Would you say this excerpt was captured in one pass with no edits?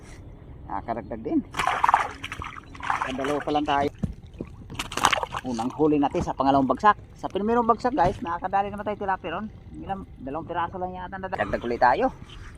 no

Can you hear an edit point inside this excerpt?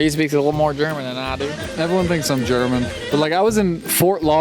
yes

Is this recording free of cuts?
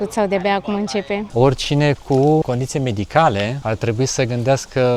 no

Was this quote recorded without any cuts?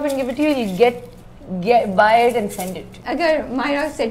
no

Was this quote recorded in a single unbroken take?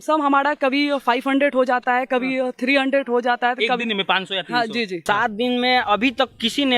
no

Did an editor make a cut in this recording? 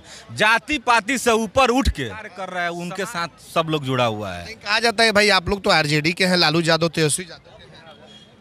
yes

